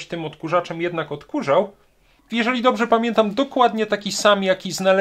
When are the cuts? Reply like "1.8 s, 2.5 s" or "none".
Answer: 2.2 s